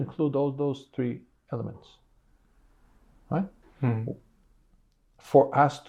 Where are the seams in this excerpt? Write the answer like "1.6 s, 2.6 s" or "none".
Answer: none